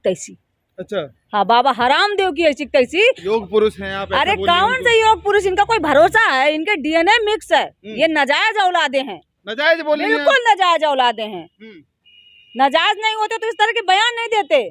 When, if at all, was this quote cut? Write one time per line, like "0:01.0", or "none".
none